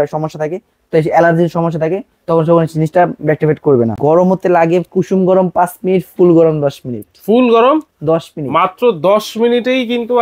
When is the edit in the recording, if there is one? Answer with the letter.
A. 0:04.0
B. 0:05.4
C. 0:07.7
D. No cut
A